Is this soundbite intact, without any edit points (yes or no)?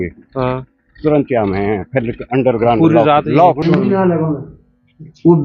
no